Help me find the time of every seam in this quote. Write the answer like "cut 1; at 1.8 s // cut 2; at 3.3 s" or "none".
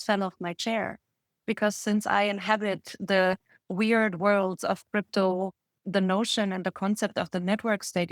cut 1; at 5.7 s